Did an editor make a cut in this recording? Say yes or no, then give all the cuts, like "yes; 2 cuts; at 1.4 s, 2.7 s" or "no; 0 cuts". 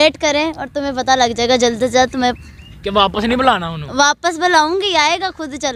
no; 0 cuts